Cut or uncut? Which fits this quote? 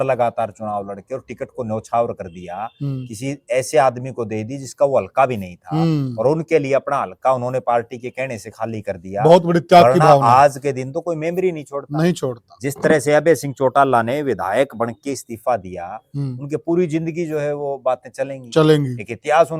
uncut